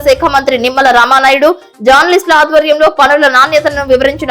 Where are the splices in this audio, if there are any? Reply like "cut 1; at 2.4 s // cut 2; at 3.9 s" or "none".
none